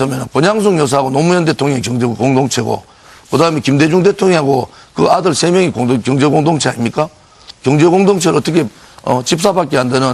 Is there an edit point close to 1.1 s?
yes; 1 cut; at 1.1 s

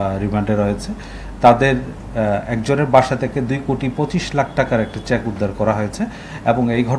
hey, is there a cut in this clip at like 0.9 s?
no; 0 cuts

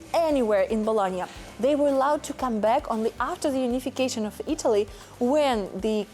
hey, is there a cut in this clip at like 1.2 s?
no; 0 cuts

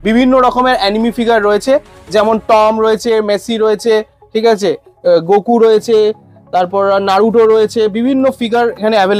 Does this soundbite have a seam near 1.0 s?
no; 0 cuts

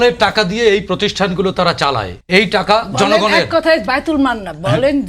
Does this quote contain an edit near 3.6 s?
no; 1 cut; at 2.1 s

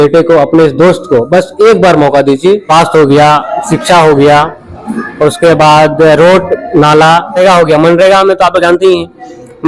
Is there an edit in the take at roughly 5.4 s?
no; 2 cuts; at 2.7 s, 7.4 s

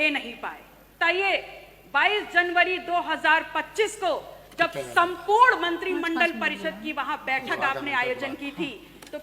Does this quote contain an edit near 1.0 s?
yes; 1 cut; at 1.0 s

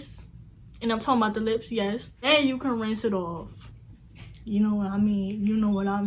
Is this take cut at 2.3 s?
yes; 1 cut; at 2.3 s

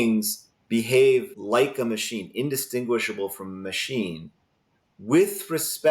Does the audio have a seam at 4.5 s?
no; 1 cut; at 1.3 s

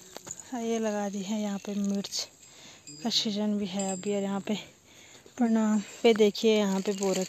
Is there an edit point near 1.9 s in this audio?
no; 1 cut; at 5.9 s

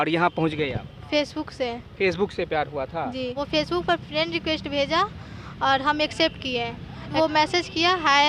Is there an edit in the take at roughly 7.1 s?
yes; 2 cuts; at 3.4 s, 7.1 s

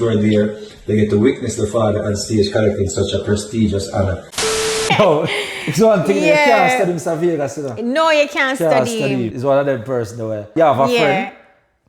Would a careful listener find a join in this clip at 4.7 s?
yes; 3 cuts; at 4.7 s, 9.3 s, 10.5 s

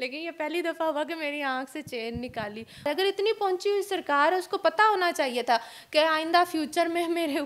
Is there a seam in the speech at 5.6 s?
no; 1 cut; at 2.9 s

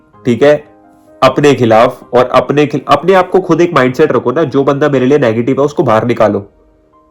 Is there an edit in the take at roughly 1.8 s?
no; 0 cuts

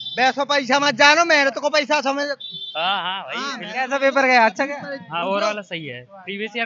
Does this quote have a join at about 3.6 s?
no; 0 cuts

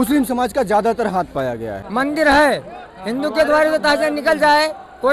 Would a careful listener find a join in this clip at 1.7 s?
yes; 1 cut; at 1.7 s

